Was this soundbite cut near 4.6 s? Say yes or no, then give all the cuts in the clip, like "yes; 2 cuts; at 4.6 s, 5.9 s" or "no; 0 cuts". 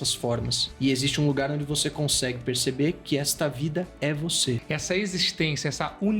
yes; 1 cut; at 4.6 s